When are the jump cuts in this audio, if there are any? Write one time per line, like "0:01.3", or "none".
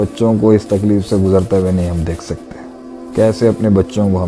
none